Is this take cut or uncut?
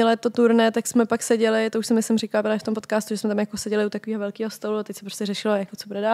uncut